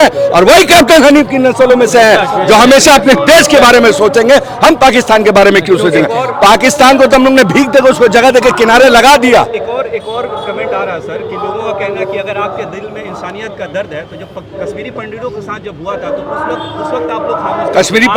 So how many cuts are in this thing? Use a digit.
0